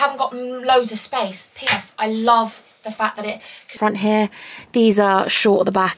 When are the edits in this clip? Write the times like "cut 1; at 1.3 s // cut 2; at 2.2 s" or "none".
cut 1; at 3.8 s